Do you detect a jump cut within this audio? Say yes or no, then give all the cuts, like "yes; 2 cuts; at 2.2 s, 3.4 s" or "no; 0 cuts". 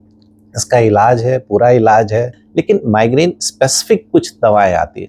yes; 1 cut; at 2.4 s